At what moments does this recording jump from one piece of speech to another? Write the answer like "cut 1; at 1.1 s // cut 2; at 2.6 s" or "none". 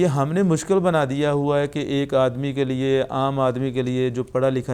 none